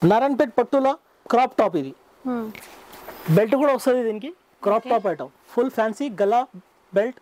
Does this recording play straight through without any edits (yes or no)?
no